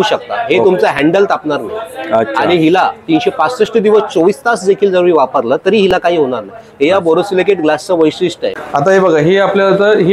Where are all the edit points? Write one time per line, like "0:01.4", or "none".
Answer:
0:08.5